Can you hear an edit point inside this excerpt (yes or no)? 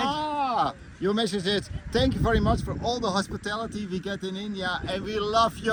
no